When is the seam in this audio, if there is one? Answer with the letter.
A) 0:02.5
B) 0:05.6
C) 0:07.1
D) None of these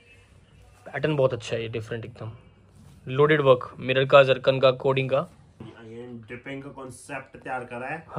B